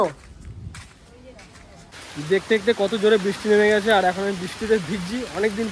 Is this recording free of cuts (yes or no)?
no